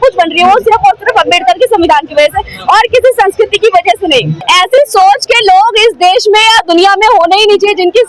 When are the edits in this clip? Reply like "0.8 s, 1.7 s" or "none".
4.4 s